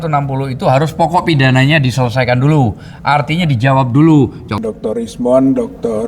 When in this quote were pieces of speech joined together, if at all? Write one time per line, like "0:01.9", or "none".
0:04.6